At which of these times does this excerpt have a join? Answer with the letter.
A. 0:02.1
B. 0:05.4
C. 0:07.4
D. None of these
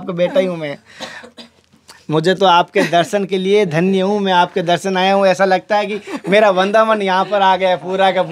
D